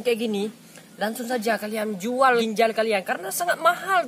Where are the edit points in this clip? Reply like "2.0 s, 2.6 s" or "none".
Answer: 2.4 s